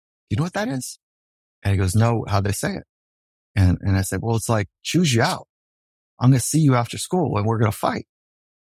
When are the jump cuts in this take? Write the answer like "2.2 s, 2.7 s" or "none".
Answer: 6.0 s